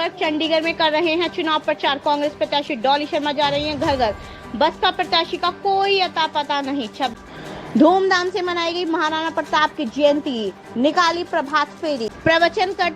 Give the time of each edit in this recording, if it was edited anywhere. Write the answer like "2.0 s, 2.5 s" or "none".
7.1 s, 12.1 s